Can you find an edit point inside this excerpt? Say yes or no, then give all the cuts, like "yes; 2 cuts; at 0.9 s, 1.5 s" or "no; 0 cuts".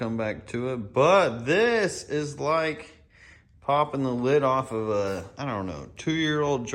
no; 0 cuts